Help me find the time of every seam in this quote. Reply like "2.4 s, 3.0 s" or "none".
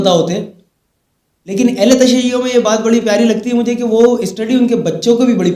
none

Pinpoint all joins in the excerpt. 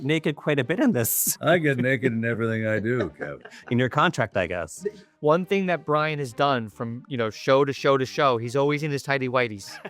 1.3 s, 5.1 s

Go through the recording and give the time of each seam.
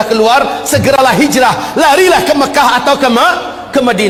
none

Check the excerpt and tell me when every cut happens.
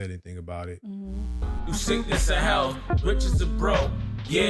1.5 s

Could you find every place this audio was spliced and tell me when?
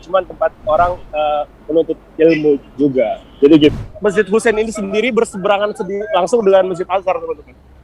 3.7 s

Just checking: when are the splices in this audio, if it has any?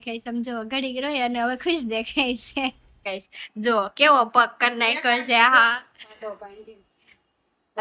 3.0 s

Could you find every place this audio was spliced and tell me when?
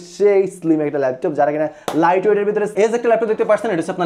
2.7 s

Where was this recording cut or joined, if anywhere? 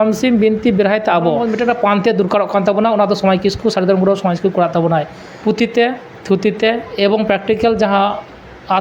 1.5 s, 5.2 s

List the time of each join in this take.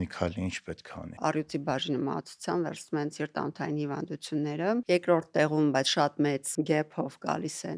1.1 s, 4.8 s, 6.5 s

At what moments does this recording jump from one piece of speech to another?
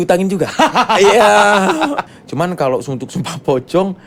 2.1 s

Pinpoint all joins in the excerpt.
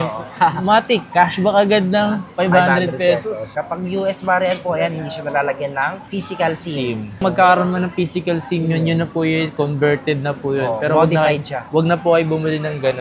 3.5 s

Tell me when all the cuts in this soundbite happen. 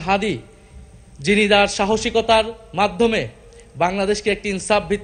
none

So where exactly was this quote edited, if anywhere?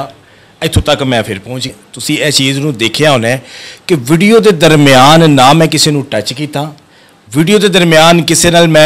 1.8 s

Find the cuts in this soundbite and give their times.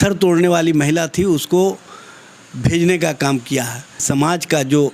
4.0 s

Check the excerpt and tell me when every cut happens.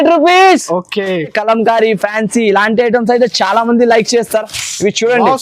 1.3 s

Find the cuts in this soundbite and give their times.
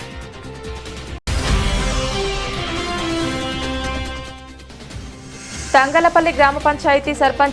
1.2 s, 5.2 s

